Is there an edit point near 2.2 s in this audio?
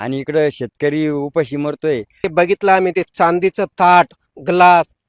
yes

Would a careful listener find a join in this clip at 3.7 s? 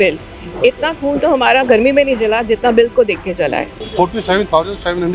yes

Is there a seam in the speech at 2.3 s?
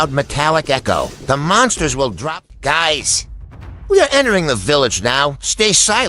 yes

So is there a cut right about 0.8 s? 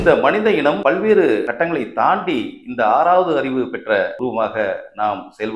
yes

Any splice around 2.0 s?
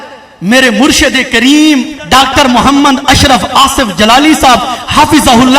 yes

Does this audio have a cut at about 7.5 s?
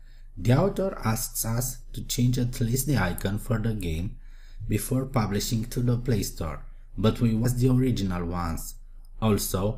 no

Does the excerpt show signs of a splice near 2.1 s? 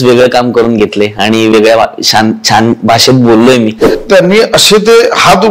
no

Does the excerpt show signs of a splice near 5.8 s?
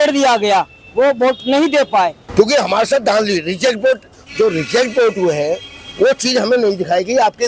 no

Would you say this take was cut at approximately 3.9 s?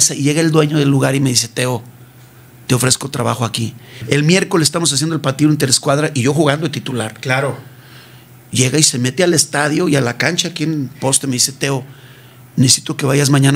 yes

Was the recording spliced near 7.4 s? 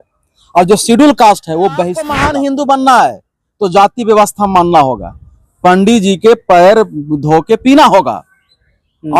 no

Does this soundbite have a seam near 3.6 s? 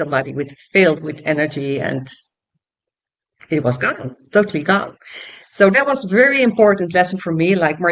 no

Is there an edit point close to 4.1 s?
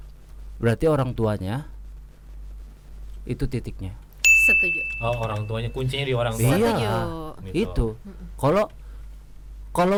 no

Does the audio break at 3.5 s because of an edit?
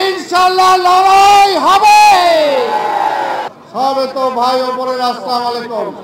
yes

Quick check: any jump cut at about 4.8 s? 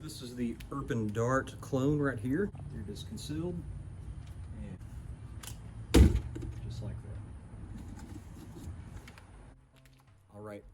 yes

